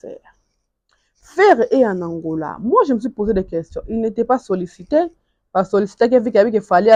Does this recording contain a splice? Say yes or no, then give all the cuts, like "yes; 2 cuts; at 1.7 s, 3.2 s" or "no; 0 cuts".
no; 0 cuts